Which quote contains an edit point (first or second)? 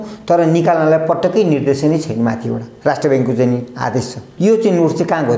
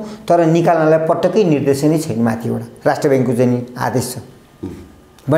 first